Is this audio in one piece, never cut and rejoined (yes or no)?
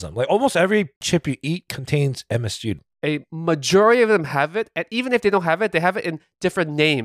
no